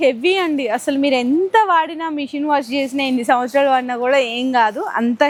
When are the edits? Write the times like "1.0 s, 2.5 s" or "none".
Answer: none